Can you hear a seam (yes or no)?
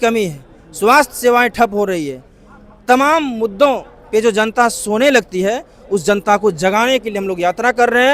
no